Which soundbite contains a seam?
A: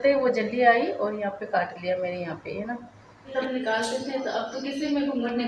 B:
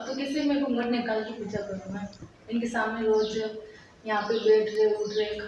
A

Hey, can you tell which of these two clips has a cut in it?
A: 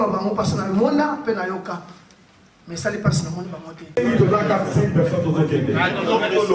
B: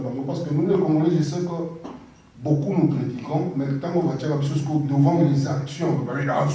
A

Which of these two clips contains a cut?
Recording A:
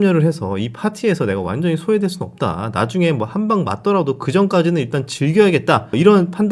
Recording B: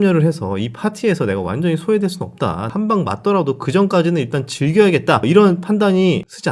B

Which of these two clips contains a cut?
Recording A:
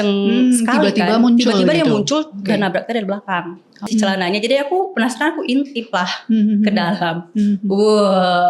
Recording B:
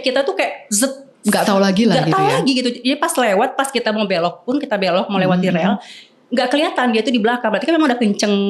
A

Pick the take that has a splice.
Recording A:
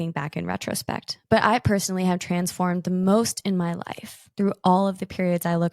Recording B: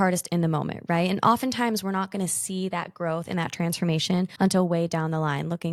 A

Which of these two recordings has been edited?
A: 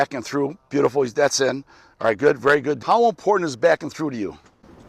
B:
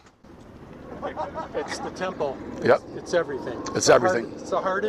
A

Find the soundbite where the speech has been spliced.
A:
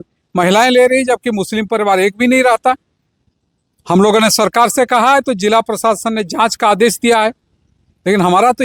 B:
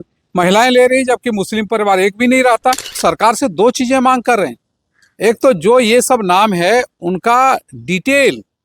B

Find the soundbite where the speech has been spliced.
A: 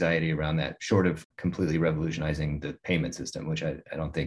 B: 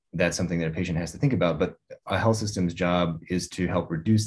A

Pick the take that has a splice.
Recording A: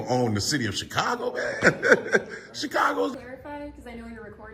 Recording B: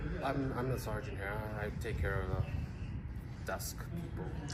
A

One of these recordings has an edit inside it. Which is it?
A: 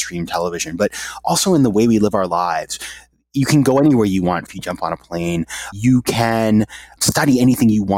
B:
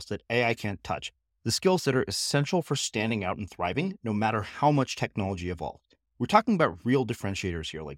A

